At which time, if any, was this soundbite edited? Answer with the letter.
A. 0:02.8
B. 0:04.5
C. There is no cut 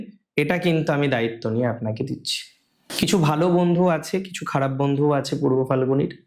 A